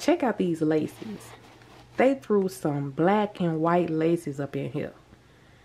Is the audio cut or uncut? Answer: uncut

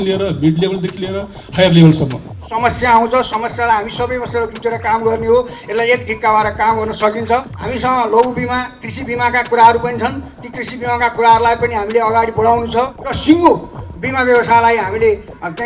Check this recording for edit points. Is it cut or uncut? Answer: cut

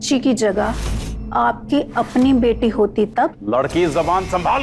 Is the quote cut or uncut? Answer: cut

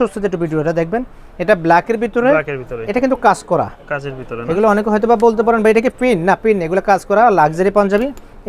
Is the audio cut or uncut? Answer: uncut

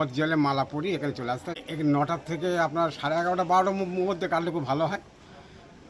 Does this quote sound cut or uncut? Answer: cut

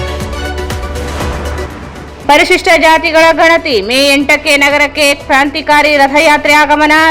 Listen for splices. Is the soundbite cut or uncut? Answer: uncut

